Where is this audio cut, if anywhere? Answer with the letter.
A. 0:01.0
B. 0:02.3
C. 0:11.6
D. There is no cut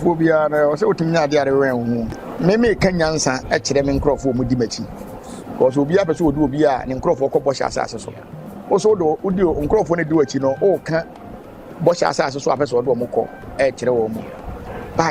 B